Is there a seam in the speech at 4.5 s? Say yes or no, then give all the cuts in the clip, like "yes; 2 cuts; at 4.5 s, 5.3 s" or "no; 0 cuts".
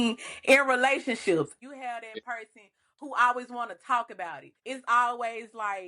yes; 2 cuts; at 1.6 s, 4.5 s